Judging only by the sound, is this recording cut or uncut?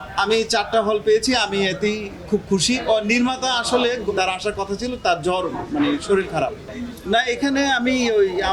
cut